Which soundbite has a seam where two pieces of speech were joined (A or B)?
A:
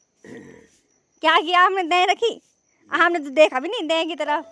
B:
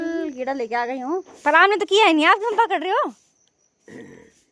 B